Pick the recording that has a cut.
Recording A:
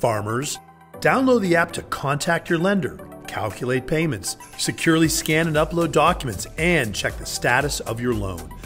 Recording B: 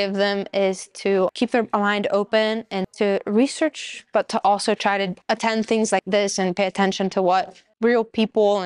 B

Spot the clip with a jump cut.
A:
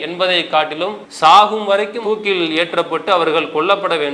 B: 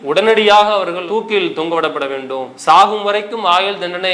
A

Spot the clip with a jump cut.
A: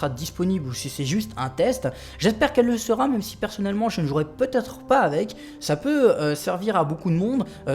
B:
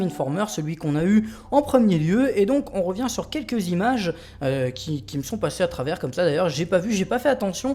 A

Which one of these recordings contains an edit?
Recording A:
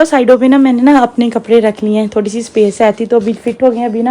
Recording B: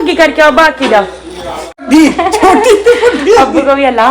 B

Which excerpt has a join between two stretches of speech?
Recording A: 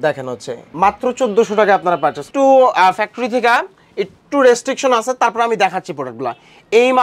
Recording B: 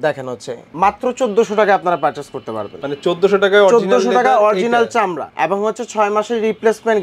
A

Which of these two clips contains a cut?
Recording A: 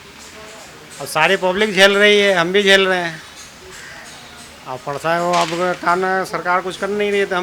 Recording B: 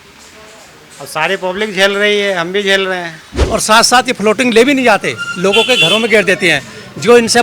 B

